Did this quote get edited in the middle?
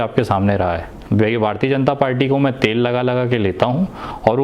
yes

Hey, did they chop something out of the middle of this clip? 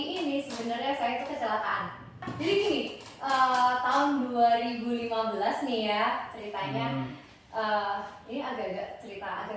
yes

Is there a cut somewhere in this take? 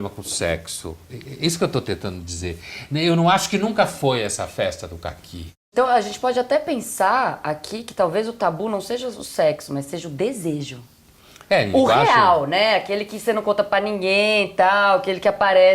yes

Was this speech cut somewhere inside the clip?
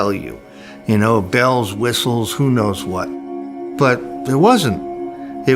yes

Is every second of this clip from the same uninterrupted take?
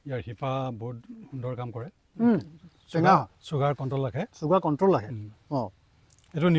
no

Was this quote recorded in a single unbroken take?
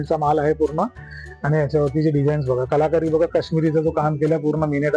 yes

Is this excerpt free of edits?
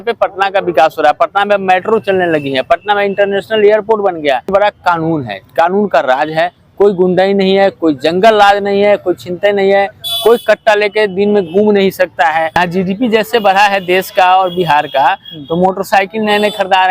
no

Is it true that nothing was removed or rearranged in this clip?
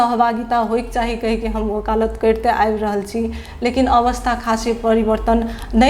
yes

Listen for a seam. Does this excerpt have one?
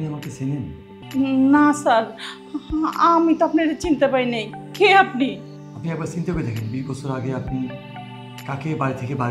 yes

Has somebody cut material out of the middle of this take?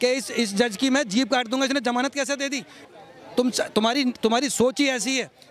yes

